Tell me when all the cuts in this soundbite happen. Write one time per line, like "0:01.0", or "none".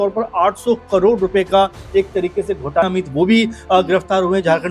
0:02.8